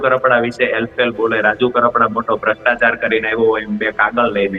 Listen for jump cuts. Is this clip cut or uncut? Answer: uncut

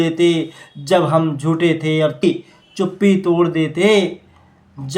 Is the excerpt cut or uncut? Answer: cut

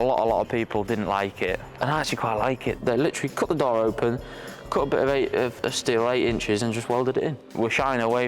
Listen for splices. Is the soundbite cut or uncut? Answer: cut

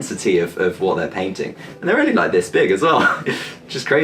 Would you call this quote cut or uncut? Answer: uncut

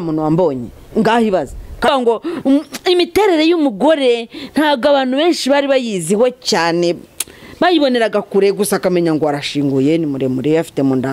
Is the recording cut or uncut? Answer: cut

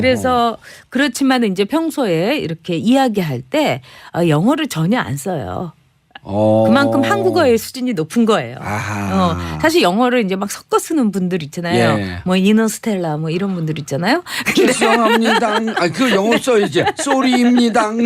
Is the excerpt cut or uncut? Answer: cut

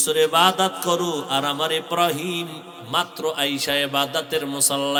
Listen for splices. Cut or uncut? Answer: uncut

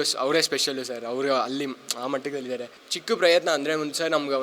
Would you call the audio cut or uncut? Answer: cut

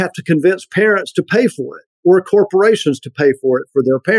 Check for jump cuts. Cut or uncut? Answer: uncut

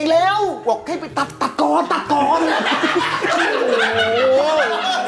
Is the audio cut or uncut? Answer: uncut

